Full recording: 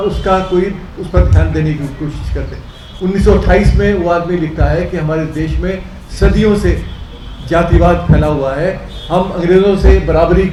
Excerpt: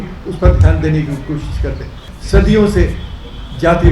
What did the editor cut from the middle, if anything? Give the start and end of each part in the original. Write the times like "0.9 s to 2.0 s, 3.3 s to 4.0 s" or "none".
2.8 s to 6.0 s